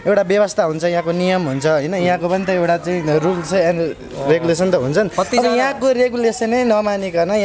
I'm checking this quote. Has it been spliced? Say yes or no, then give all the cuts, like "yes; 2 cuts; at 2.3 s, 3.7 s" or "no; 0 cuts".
no; 0 cuts